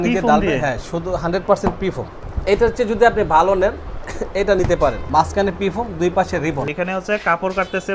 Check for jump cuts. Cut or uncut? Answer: cut